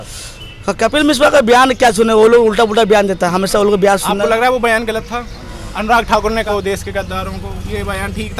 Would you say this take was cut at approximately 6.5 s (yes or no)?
yes